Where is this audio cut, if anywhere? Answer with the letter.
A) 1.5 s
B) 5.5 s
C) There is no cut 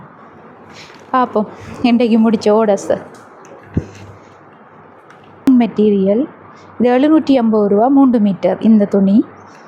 B